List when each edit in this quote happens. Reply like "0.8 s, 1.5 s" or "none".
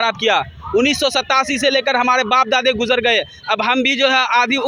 none